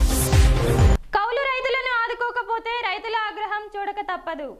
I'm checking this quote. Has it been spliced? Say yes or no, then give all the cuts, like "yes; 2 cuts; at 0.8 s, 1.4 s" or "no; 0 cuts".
yes; 1 cut; at 1.0 s